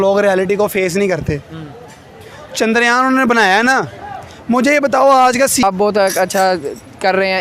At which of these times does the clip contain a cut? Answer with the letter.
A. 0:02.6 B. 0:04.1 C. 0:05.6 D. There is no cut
C